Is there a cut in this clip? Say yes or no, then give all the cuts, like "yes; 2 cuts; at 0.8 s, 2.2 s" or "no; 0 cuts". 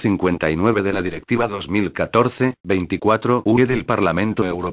no; 0 cuts